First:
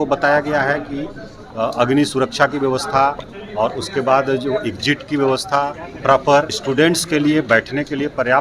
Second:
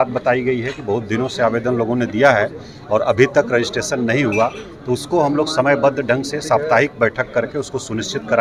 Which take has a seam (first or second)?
first